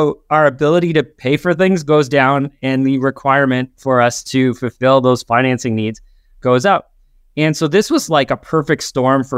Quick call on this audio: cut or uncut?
uncut